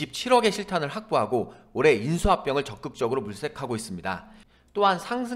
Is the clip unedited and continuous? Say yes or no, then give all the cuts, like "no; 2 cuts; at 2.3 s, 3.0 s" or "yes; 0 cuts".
no; 1 cut; at 4.4 s